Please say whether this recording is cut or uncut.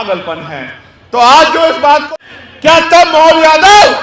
cut